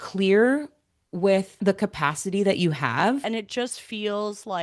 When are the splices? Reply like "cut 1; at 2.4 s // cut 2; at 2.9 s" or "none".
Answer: cut 1; at 1.6 s // cut 2; at 3.2 s